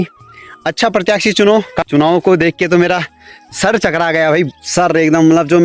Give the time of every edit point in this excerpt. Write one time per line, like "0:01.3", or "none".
0:01.8